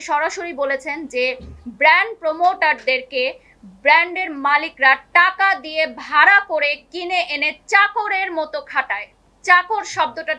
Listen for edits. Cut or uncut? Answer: uncut